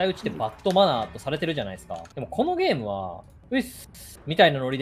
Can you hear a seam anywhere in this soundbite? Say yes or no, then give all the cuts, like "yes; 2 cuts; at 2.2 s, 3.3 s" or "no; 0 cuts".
no; 0 cuts